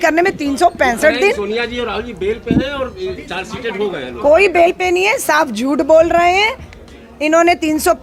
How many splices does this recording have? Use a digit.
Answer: 0